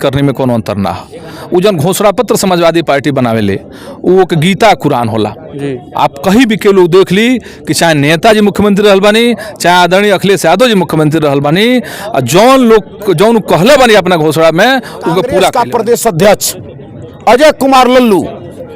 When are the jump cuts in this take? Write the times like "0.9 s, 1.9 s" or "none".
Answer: 15.5 s